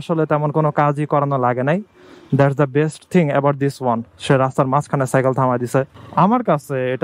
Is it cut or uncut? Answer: cut